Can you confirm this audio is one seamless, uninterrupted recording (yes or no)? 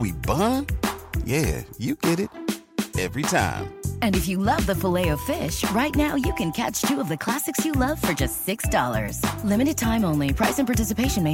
yes